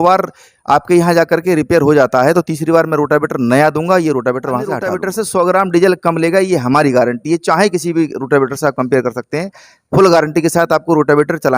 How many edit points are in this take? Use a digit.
1